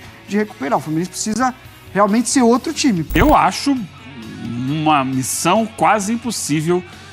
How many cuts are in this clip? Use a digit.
1